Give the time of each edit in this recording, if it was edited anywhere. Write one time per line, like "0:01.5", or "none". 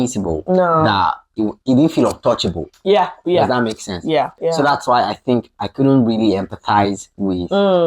0:04.3